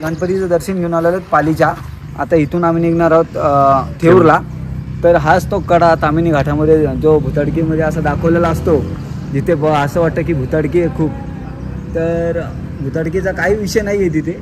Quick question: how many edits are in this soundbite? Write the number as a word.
zero